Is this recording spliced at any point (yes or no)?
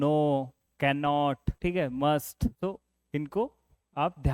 yes